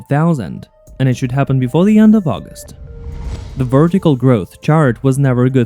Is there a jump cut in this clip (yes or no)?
yes